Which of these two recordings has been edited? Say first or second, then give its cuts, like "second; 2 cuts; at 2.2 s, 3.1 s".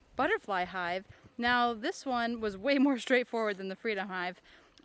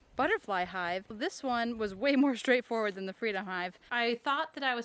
second; 2 cuts; at 1.2 s, 3.8 s